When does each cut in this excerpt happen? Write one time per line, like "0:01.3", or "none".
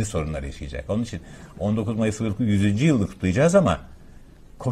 none